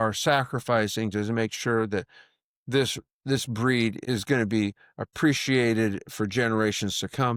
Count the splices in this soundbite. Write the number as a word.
zero